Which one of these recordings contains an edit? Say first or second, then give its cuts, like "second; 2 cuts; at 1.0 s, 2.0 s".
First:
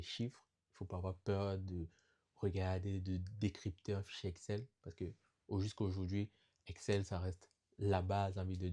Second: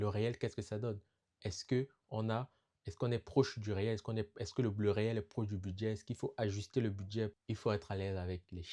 second; 1 cut; at 7.4 s